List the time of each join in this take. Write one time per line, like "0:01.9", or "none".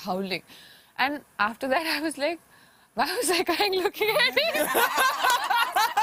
none